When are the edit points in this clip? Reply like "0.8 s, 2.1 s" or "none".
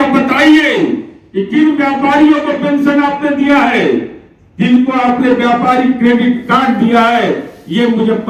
none